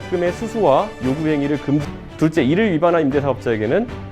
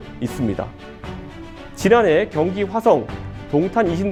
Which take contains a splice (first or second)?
first